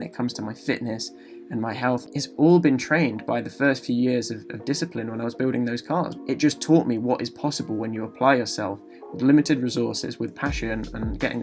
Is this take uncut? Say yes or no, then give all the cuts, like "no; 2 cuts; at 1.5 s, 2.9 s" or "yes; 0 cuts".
no; 2 cuts; at 2.0 s, 6.2 s